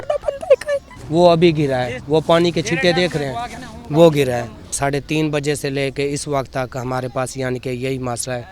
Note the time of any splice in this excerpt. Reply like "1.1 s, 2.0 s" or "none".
0.9 s, 4.8 s